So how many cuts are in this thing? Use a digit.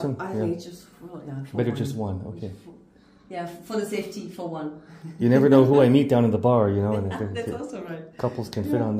0